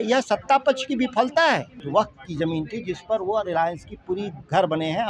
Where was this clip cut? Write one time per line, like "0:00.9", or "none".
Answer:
0:01.8

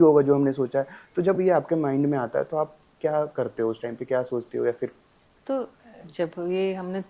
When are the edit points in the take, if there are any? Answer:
none

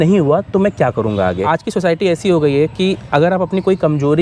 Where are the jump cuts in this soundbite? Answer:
0:01.4

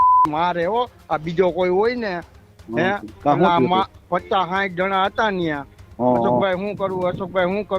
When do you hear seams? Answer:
none

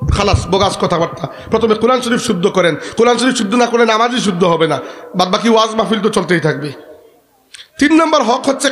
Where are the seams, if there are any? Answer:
none

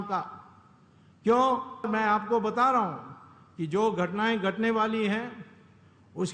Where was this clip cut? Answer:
0:01.9

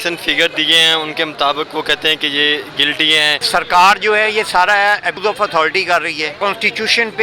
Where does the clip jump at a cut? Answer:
0:03.4
0:05.2
0:06.4

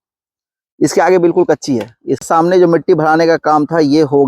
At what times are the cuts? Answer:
0:02.2

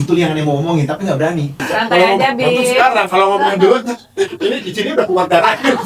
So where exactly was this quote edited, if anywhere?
0:01.6

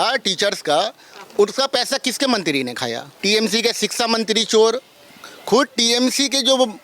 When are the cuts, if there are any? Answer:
0:03.1

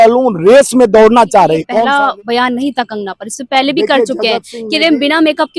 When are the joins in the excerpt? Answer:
0:01.8

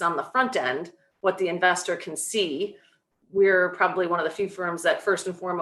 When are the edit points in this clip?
none

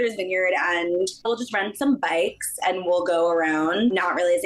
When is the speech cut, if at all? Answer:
0:01.3

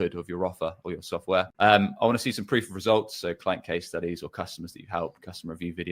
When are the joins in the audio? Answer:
0:01.5

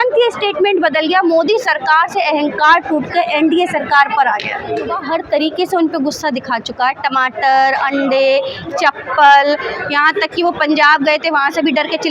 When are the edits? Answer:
0:05.0

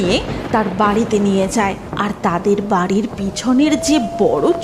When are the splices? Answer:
0:01.9

